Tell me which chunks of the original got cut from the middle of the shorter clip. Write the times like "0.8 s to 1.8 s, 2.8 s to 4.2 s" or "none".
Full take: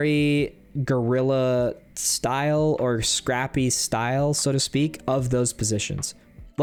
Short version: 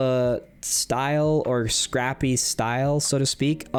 none